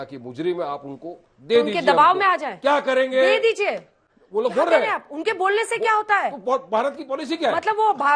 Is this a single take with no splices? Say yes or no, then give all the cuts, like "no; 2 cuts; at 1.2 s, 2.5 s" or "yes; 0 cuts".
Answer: yes; 0 cuts